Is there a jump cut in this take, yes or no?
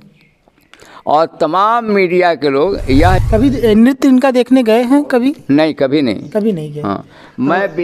yes